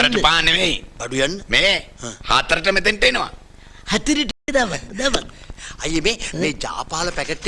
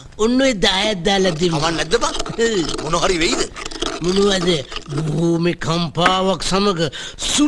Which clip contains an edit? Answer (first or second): first